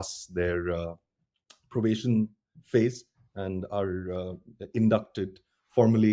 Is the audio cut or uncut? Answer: uncut